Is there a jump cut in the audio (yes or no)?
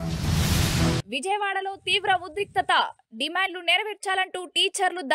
yes